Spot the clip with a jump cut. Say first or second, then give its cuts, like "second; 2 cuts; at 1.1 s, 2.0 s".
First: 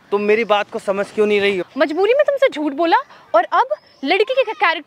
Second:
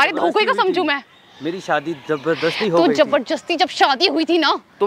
first; 1 cut; at 1.7 s